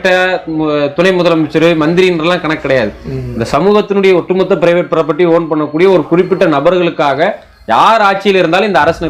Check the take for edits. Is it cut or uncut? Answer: uncut